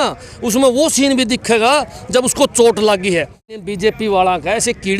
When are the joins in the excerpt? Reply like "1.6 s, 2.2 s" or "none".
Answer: 3.6 s